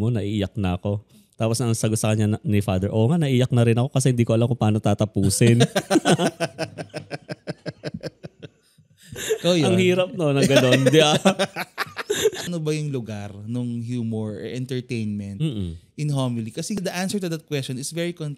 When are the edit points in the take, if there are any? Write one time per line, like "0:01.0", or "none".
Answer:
0:12.5
0:16.8